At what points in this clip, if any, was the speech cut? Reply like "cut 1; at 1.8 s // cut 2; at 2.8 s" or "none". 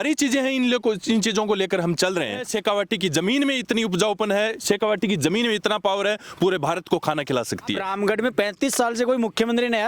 cut 1; at 2.5 s // cut 2; at 7.8 s

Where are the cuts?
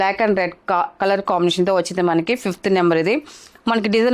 none

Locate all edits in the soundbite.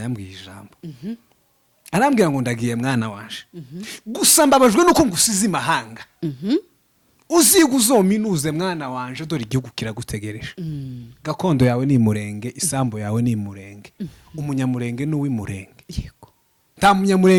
none

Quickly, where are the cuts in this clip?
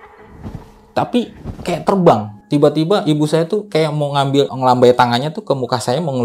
cut 1; at 2.3 s // cut 2; at 4.5 s

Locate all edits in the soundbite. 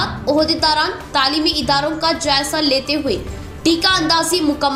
none

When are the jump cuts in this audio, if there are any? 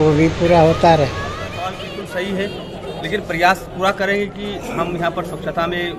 cut 1; at 1.4 s

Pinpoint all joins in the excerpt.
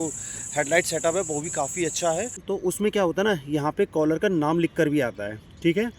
cut 1; at 2.4 s

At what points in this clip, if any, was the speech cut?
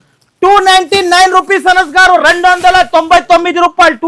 none

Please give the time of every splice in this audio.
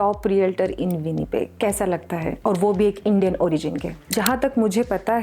cut 1; at 1.5 s // cut 2; at 4.1 s

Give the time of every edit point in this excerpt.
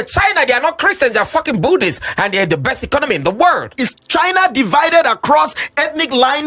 cut 1; at 3.8 s

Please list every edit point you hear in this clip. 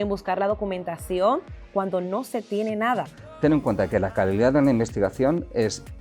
cut 1; at 3.2 s

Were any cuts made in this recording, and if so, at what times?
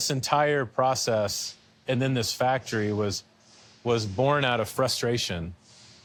none

